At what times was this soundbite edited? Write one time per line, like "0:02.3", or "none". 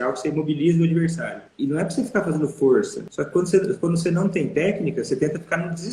0:01.4
0:03.0